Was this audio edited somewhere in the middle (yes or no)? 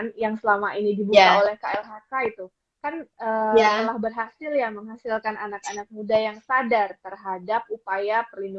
no